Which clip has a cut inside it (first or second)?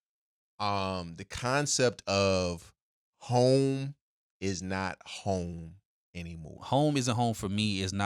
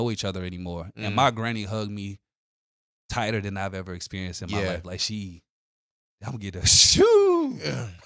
first